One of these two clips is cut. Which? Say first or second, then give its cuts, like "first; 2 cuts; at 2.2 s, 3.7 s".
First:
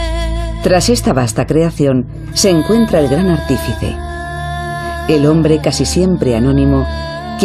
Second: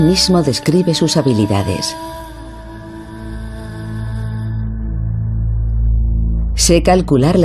second; 1 cut; at 3.6 s